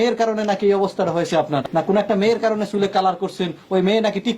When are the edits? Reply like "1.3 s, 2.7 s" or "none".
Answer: 1.7 s